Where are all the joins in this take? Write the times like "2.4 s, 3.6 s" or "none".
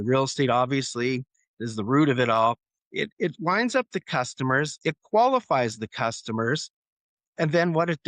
4.7 s